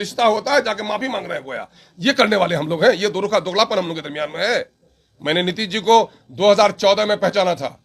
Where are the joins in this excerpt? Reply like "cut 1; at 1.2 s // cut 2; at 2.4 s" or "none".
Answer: none